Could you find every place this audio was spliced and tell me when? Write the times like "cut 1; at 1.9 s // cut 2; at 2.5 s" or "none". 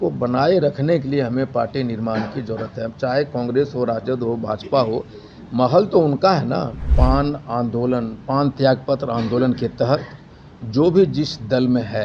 cut 1; at 6.8 s